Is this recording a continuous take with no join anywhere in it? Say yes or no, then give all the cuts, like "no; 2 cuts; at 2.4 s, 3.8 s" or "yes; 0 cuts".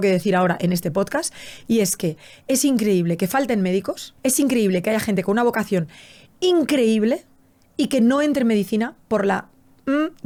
yes; 0 cuts